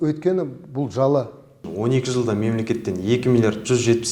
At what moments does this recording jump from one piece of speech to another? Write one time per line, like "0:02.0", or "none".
0:01.6